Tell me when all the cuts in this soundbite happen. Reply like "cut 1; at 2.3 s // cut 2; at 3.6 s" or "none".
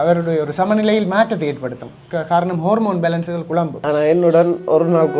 cut 1; at 3.8 s